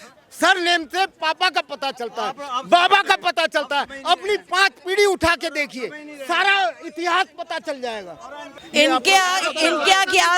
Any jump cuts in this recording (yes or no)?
yes